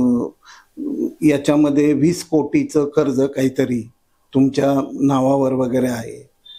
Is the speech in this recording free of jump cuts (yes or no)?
yes